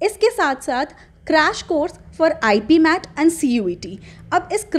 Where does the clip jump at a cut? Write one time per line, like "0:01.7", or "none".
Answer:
none